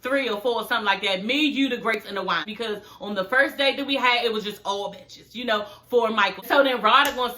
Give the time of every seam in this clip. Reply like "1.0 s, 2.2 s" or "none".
2.4 s, 6.4 s